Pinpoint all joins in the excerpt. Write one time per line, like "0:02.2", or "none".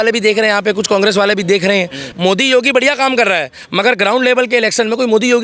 0:02.0